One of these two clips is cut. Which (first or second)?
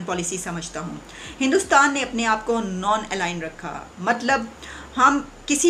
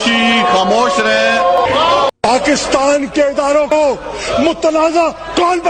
second